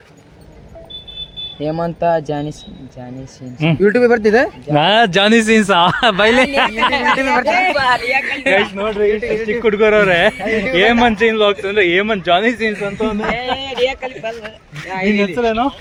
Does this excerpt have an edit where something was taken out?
no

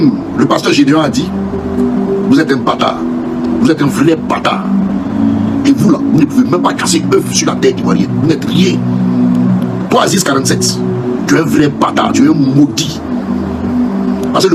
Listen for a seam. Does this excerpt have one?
no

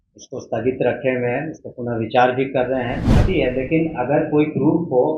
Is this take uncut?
no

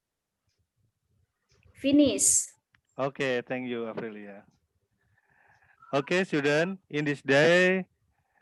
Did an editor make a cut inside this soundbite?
no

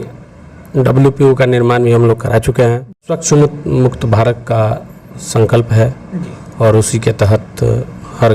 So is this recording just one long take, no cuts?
no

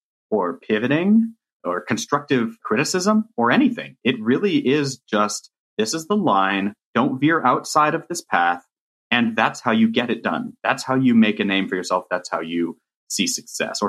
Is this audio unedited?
no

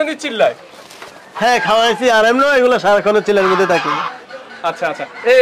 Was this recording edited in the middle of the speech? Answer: no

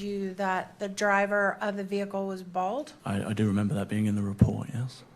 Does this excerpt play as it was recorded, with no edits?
no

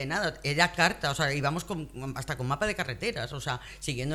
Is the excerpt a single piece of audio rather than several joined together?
yes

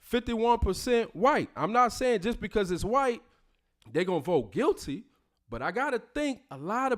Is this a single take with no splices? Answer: no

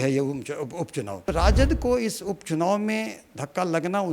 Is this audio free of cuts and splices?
no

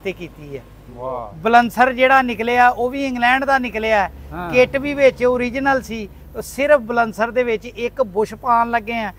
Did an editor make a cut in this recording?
no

